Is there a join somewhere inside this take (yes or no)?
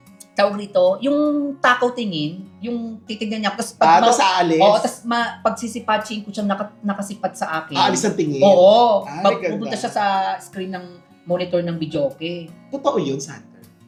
no